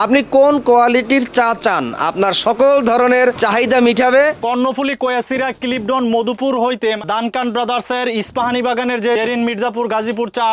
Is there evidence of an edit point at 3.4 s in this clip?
yes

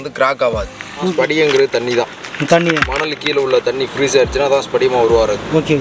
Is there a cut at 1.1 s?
yes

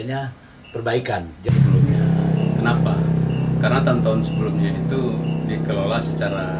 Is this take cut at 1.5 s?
yes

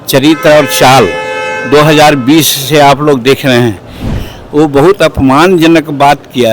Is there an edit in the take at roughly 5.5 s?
no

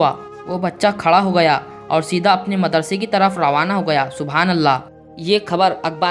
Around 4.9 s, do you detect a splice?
no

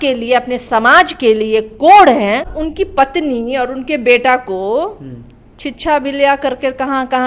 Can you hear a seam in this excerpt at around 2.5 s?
yes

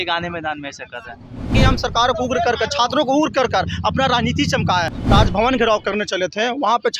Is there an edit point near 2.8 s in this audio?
no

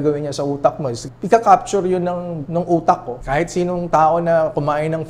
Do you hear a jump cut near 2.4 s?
yes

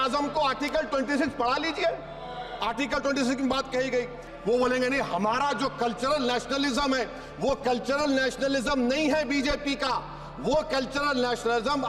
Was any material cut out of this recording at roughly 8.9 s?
no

